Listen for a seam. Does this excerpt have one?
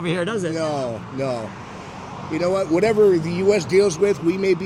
no; 0 cuts

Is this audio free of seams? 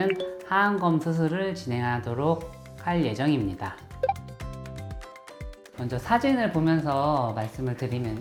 yes; 0 cuts

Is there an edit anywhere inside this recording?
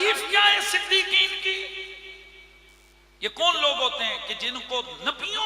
no; 0 cuts

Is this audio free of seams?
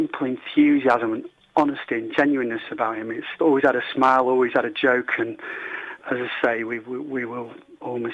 no; 2 cuts; at 3.3 s, 6.0 s

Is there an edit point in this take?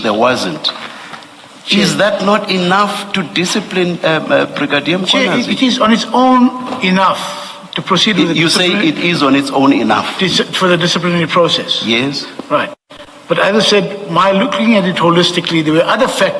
no; 0 cuts

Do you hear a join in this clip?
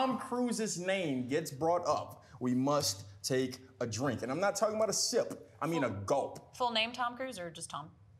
no; 0 cuts

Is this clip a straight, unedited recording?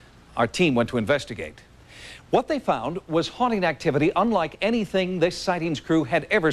yes; 0 cuts

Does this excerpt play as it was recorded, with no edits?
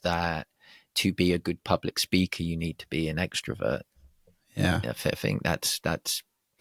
yes; 0 cuts

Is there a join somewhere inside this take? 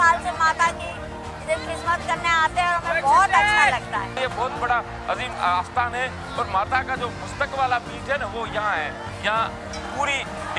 yes; 2 cuts; at 4.1 s, 9.1 s

